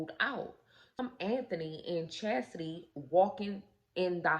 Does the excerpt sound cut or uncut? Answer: cut